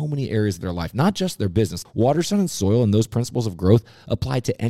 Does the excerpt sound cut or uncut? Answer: cut